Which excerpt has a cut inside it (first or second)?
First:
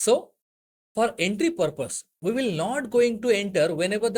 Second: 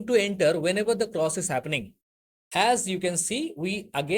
second